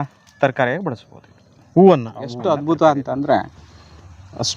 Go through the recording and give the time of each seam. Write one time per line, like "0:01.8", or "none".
0:02.4